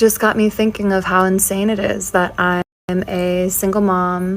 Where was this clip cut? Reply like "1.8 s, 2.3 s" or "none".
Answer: 2.8 s